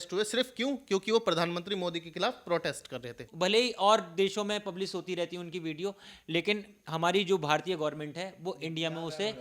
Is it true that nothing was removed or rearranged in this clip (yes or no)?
no